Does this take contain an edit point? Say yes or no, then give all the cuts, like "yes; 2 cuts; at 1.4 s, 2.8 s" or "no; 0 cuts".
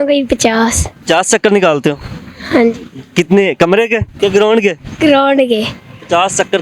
yes; 2 cuts; at 0.9 s, 4.1 s